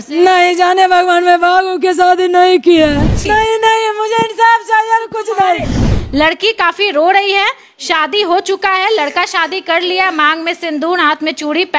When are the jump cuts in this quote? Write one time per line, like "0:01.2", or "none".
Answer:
0:03.2
0:05.9